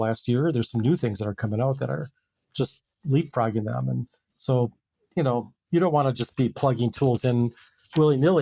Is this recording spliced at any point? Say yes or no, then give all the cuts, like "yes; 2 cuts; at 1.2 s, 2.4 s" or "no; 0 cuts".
no; 0 cuts